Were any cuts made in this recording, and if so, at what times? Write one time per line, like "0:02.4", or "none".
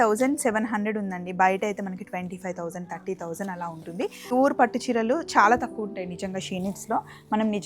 0:04.3